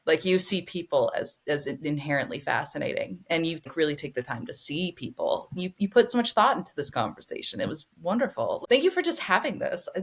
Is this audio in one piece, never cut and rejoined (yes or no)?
no